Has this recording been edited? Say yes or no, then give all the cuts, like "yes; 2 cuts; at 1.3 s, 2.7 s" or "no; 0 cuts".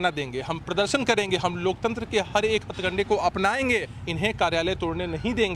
yes; 1 cut; at 4.0 s